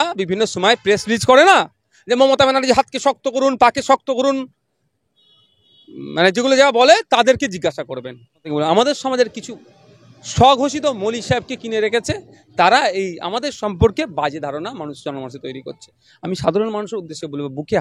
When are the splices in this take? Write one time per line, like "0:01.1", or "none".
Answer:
0:08.5